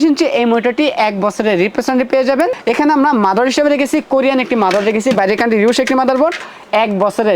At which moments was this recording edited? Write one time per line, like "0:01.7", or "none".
0:02.6